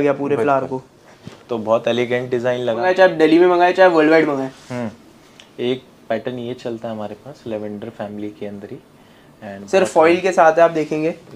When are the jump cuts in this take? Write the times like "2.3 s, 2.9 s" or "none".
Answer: 2.8 s

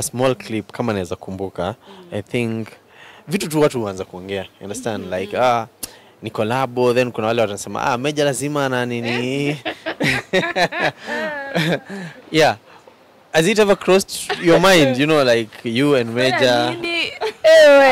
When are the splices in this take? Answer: none

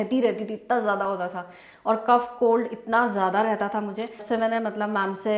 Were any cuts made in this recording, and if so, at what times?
4.2 s

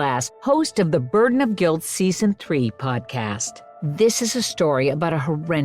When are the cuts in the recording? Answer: 3.4 s

